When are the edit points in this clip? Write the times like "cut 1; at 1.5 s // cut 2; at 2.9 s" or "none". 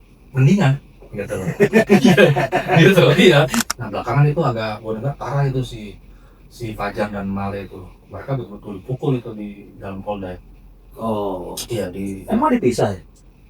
cut 1; at 3.7 s